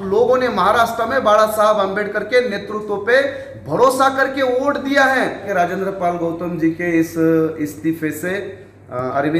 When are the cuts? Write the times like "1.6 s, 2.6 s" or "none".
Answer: 5.5 s